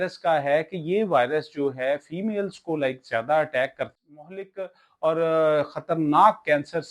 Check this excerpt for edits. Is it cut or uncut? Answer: cut